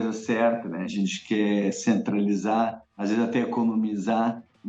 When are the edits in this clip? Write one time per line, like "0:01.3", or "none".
0:00.9

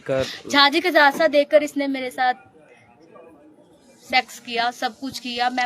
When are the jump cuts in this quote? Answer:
none

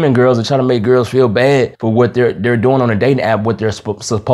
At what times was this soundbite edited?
none

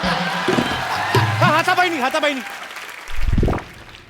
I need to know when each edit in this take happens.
none

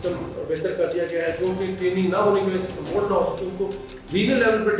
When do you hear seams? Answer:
none

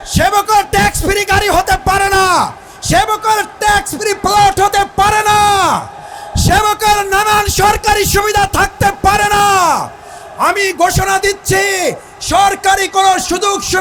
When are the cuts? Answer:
none

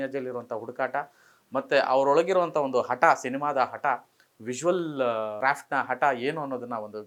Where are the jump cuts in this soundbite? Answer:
none

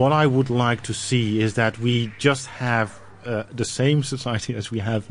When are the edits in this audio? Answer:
none

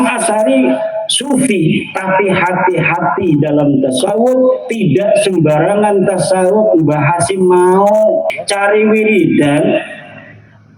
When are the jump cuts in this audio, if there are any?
0:08.3

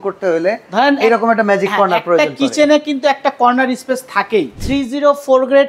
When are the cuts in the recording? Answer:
0:04.6

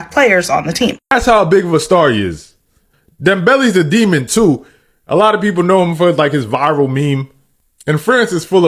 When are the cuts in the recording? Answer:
0:01.1

